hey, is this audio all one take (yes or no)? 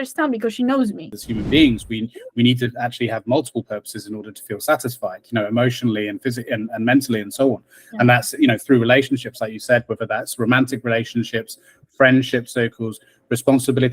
no